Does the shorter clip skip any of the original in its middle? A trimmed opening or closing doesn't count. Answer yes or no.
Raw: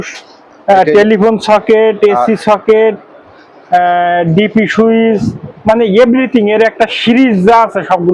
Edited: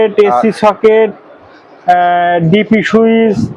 no